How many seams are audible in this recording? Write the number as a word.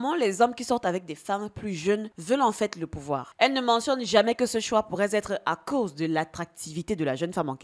one